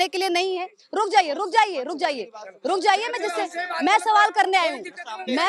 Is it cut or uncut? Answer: uncut